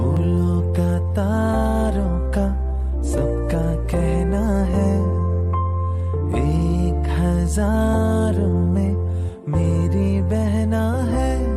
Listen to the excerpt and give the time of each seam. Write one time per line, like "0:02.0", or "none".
none